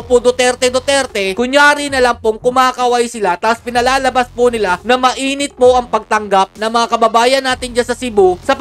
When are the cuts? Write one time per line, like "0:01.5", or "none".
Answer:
none